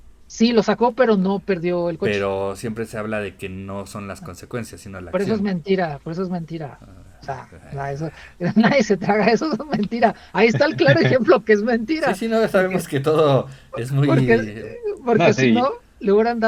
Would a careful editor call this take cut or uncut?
uncut